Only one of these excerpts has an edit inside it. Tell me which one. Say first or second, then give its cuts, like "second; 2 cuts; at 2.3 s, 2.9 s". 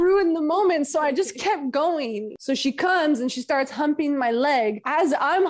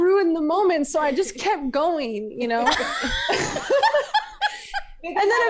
first; 1 cut; at 2.3 s